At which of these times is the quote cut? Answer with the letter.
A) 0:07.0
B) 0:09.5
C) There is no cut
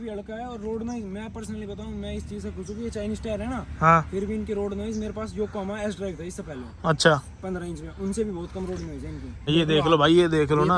B